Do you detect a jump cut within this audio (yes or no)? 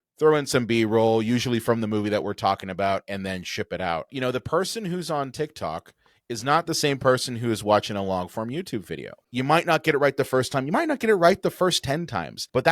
yes